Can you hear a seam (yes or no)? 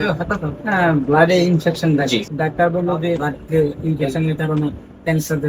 yes